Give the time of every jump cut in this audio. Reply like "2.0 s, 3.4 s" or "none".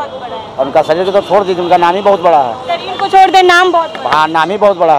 none